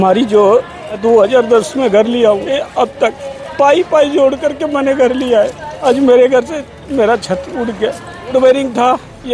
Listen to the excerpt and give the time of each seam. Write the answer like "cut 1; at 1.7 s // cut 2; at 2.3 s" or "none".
cut 1; at 1.0 s // cut 2; at 2.6 s // cut 3; at 5.7 s // cut 4; at 8.3 s